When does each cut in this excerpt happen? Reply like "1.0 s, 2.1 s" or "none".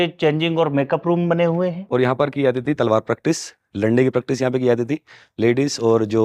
1.8 s

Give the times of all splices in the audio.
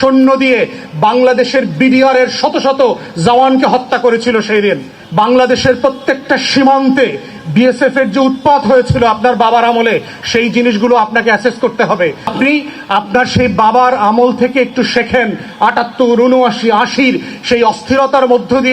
4.9 s, 12.3 s

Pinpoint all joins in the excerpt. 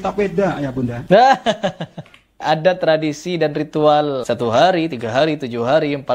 1.0 s, 2.4 s, 4.2 s

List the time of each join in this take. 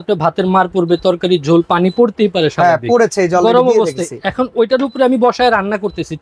none

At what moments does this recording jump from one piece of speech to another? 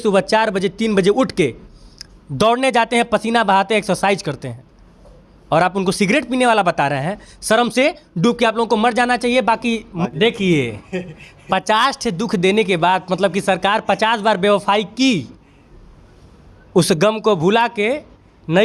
9.9 s

